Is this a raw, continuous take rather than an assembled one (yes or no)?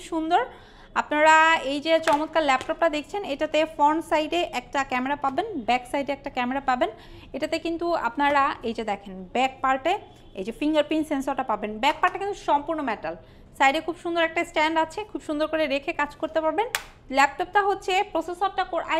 yes